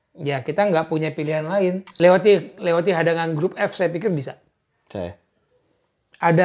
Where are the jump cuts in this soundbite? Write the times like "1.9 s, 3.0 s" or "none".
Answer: 1.9 s